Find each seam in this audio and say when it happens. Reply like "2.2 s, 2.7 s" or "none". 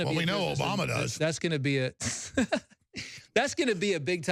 none